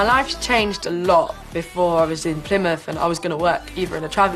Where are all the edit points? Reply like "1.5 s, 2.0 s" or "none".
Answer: none